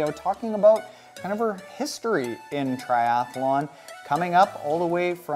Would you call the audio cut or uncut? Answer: cut